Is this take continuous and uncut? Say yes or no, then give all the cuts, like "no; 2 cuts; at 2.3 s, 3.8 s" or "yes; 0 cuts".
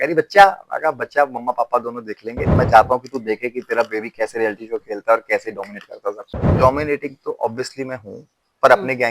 no; 2 cuts; at 2.6 s, 6.4 s